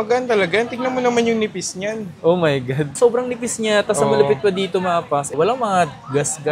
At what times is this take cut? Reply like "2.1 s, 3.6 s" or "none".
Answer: none